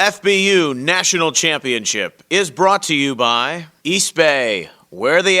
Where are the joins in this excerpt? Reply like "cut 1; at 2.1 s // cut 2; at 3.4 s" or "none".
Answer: cut 1; at 3.6 s

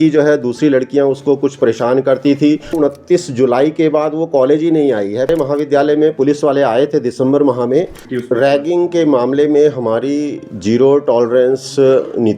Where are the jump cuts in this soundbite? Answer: cut 1; at 2.7 s // cut 2; at 5.3 s // cut 3; at 8.0 s

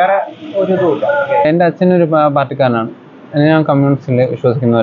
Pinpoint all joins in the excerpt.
cut 1; at 1.4 s

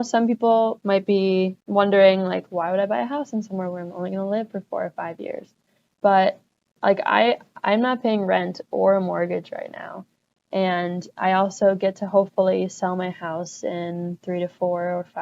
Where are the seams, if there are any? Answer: cut 1; at 0.8 s // cut 2; at 1.6 s

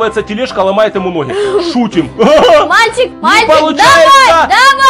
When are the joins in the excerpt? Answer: none

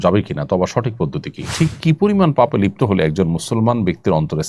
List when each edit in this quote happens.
cut 1; at 1.5 s

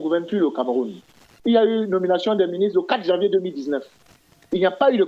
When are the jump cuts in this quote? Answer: cut 1; at 1.3 s

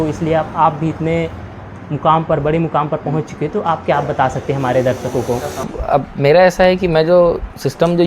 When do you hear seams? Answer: cut 1; at 5.5 s

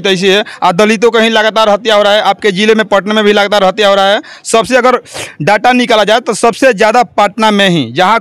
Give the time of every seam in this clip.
none

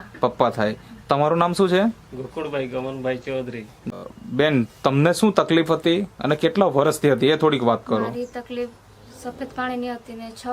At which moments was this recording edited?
cut 1; at 3.9 s

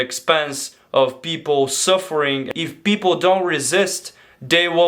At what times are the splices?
cut 1; at 2.5 s

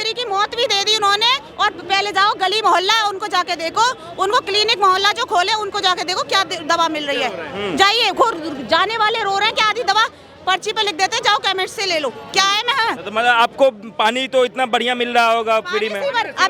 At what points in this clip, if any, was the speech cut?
none

